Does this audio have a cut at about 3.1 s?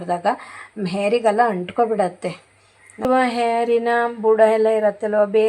yes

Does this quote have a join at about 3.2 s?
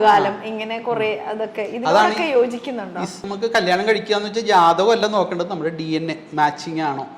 yes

